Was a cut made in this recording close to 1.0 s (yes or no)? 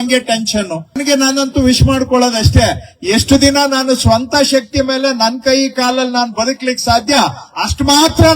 yes